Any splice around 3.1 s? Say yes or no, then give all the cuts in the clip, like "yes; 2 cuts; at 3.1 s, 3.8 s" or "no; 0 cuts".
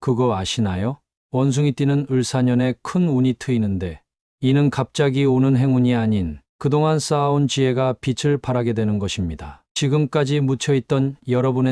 no; 1 cut; at 1.1 s